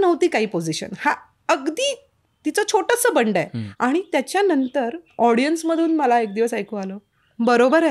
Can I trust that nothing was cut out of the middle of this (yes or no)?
no